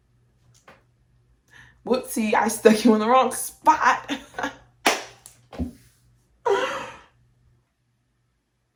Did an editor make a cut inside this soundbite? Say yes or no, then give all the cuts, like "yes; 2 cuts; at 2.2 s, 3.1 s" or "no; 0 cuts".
no; 0 cuts